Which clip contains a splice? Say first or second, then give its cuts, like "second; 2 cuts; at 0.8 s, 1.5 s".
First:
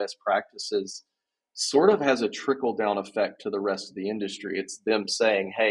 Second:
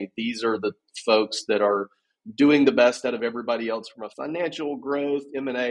second; 1 cut; at 4.0 s